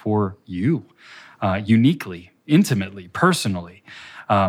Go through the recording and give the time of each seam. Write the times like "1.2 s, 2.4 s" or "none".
none